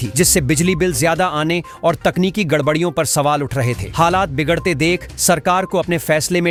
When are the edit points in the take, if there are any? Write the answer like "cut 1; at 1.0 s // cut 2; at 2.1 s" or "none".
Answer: none